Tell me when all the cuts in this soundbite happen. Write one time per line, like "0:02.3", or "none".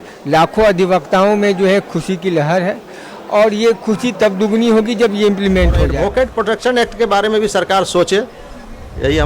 0:05.9